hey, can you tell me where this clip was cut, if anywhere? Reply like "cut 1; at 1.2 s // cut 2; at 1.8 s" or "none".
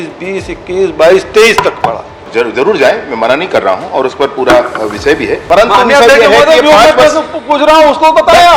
cut 1; at 2.2 s // cut 2; at 5.4 s